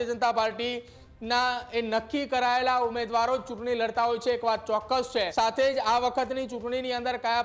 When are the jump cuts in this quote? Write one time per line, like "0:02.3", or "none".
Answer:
0:05.3